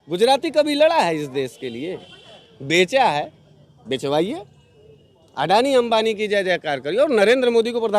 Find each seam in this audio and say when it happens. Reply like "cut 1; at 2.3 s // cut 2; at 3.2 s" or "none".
none